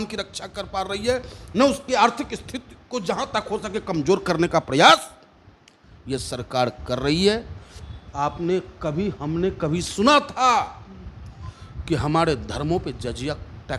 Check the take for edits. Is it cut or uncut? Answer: uncut